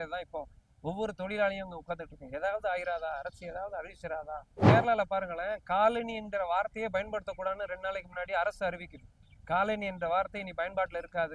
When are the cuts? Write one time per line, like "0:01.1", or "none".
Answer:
0:04.5